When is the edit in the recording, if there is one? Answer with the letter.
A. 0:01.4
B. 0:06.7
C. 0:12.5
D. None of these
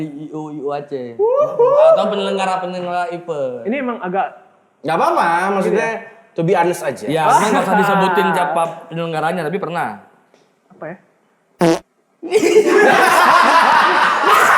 D